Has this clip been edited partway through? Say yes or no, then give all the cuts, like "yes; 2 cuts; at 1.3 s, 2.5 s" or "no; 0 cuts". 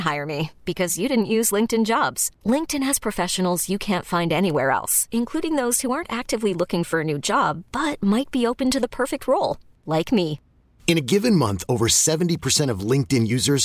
no; 0 cuts